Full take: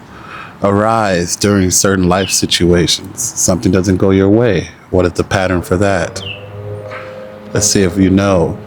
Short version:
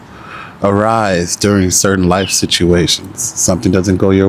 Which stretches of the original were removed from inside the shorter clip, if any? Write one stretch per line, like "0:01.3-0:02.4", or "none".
none